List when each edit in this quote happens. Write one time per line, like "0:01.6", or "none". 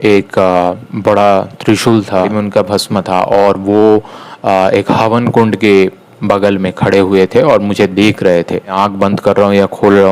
0:02.3
0:08.7